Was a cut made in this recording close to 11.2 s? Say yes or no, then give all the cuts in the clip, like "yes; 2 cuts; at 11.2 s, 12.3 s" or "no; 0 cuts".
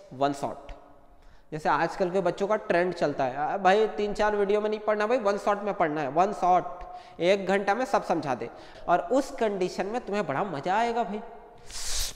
no; 1 cut; at 8.7 s